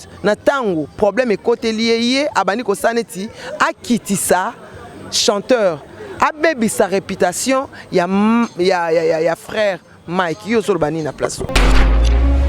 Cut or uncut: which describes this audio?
cut